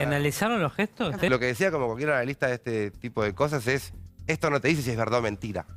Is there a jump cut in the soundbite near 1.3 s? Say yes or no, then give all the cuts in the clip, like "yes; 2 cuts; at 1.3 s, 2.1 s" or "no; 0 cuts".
yes; 1 cut; at 1.3 s